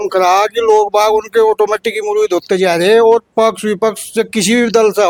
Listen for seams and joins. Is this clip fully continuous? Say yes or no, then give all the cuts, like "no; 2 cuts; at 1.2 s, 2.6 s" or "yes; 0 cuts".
yes; 0 cuts